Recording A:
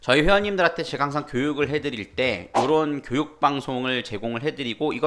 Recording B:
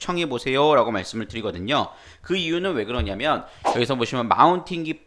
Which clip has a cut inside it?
B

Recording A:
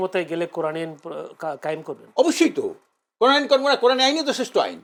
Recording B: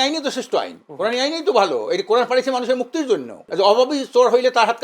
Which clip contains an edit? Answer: B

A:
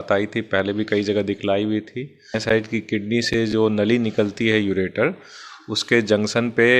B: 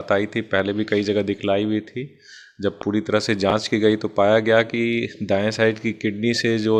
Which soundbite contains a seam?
A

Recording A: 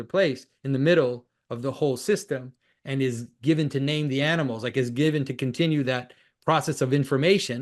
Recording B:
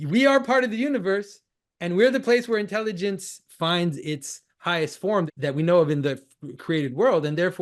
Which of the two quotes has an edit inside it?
B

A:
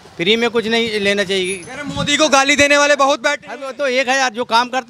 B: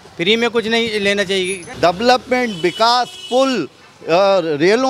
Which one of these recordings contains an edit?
B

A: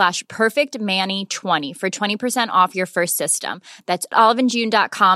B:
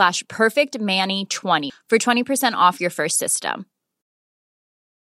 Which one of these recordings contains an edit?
B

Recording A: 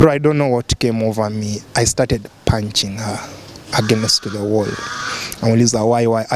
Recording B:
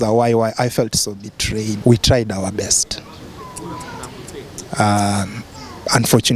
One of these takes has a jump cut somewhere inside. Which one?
B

